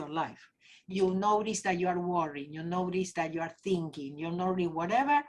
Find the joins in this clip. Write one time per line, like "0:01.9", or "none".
0:00.9